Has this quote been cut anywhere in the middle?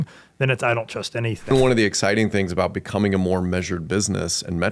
yes; 1 cut; at 1.5 s

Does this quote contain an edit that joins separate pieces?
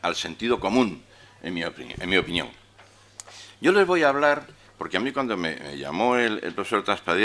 yes; 1 cut; at 3.7 s

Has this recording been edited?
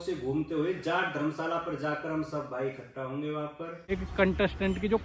yes; 1 cut; at 3.9 s

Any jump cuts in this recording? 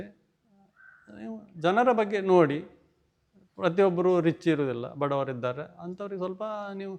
no; 0 cuts

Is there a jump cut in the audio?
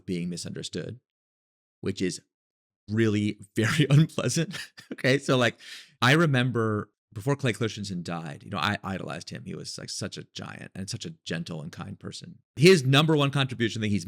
yes; 1 cut; at 12.6 s

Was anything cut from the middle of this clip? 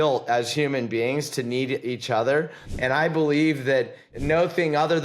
yes; 2 cuts; at 2.6 s, 4.1 s

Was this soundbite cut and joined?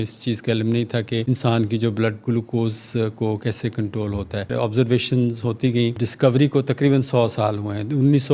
yes; 3 cuts; at 1.2 s, 4.5 s, 6.0 s

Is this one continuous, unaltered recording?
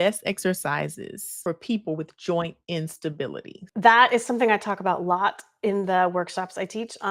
yes; 0 cuts

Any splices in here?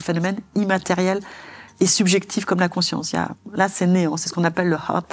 no; 0 cuts

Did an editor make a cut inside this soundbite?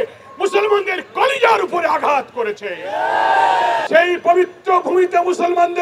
yes; 1 cut; at 3.8 s

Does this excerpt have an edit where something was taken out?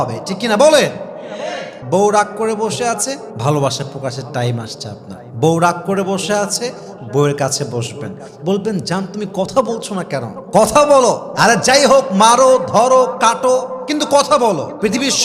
yes; 1 cut; at 1.7 s

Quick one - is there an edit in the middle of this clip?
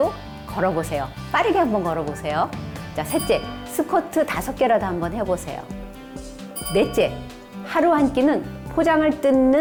no; 0 cuts

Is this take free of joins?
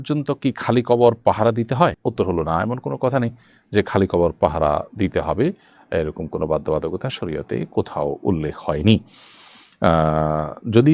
yes; 0 cuts

